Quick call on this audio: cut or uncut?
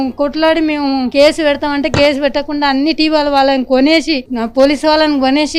uncut